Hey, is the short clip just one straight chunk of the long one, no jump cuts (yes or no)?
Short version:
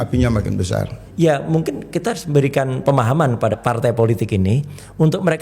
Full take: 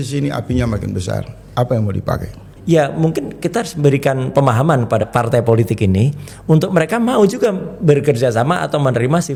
no